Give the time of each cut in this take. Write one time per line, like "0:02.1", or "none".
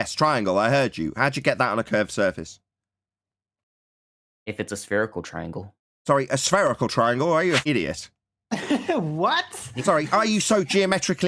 0:07.7